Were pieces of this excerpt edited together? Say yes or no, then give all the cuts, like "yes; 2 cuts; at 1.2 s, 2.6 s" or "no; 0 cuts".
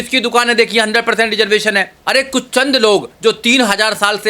yes; 1 cut; at 1.9 s